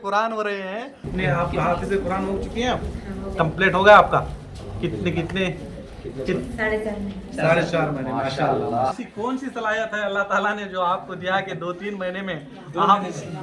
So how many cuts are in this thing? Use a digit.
2